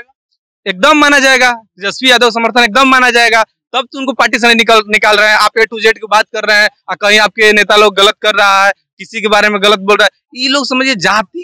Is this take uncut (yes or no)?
yes